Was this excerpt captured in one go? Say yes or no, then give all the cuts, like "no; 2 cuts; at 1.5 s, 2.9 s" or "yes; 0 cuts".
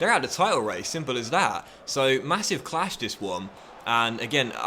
yes; 0 cuts